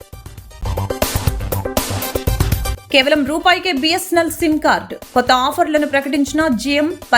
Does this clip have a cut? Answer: yes; 1 cut; at 2.8 s

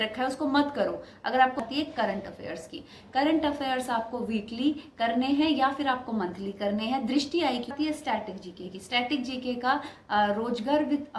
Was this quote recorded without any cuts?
no; 2 cuts; at 1.6 s, 7.7 s

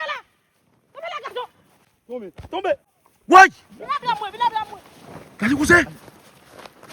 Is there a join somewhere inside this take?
no; 0 cuts

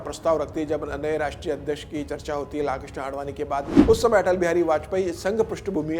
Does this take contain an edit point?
yes; 1 cut; at 3.7 s

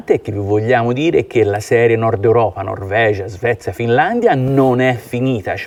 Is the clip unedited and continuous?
yes; 0 cuts

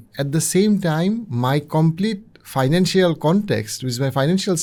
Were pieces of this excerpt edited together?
no; 0 cuts

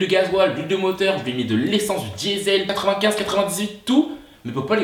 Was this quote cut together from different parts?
no; 0 cuts

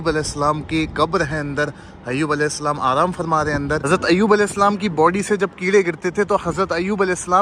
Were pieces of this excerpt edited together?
yes; 1 cut; at 3.9 s

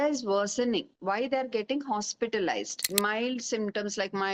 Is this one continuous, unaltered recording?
no; 1 cut; at 2.9 s

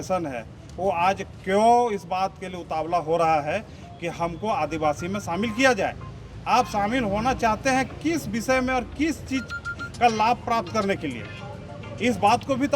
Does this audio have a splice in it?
no; 0 cuts

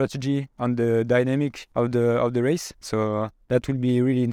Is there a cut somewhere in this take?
yes; 2 cuts; at 1.6 s, 3.4 s

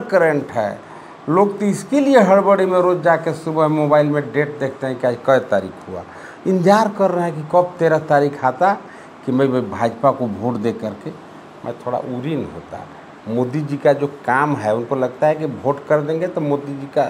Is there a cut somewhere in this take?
no; 0 cuts

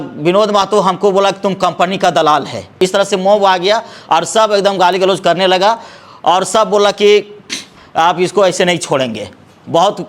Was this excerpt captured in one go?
no; 1 cut; at 2.7 s

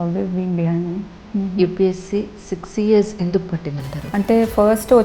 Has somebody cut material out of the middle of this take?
yes; 2 cuts; at 1.2 s, 4.0 s

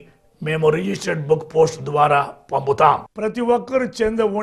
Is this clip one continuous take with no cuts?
no; 1 cut; at 3.1 s

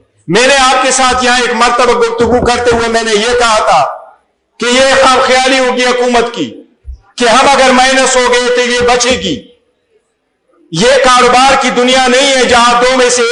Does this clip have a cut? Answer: no; 0 cuts

